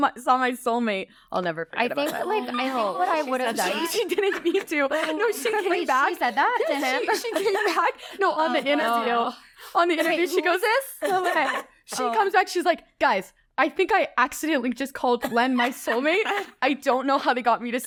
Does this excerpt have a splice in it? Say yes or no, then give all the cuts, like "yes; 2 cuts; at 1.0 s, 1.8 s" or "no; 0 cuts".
no; 0 cuts